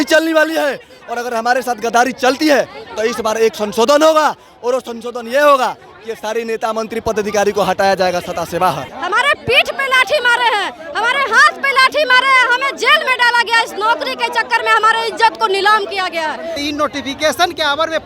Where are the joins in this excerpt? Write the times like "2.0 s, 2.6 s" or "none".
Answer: 8.9 s, 16.5 s